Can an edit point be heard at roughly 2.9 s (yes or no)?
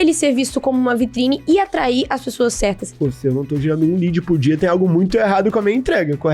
yes